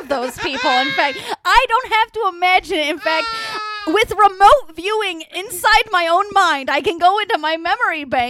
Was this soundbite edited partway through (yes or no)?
no